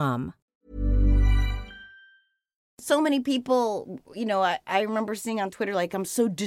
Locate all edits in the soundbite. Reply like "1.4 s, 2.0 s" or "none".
2.6 s